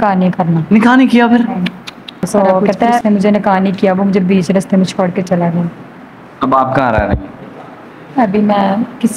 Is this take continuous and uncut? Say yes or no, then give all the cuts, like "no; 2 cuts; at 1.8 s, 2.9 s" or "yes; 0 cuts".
no; 1 cut; at 3.0 s